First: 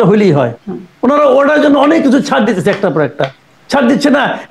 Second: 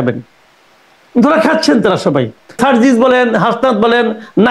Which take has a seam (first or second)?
second